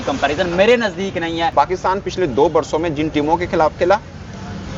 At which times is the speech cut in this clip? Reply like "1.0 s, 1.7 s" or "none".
1.5 s